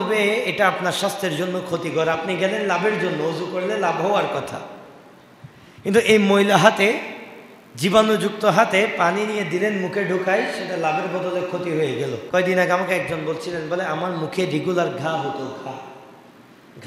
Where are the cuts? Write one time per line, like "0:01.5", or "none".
0:12.2